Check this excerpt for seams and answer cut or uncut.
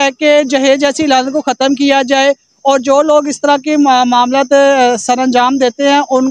uncut